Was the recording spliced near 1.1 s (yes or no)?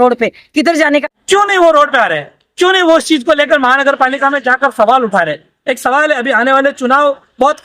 yes